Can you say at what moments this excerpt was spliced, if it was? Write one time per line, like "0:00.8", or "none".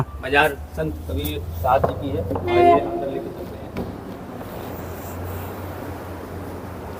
none